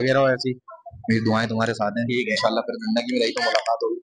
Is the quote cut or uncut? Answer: uncut